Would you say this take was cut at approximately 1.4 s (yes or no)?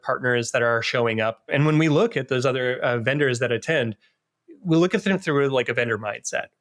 yes